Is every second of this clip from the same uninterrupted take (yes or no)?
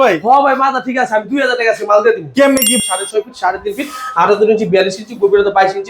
no